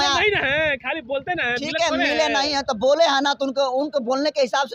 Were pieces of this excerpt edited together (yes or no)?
no